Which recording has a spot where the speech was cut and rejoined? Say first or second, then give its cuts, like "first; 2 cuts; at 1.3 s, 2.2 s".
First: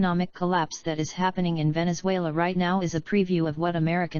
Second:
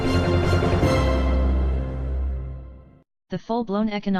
first; 1 cut; at 2.2 s